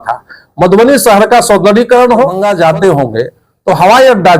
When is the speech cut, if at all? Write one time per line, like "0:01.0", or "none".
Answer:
0:02.4